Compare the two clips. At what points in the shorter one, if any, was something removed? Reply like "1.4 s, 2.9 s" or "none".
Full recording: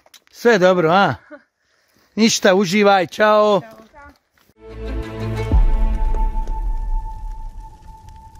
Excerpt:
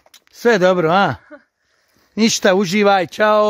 none